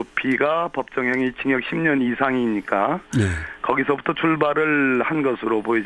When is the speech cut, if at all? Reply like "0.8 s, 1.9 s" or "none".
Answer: 1.0 s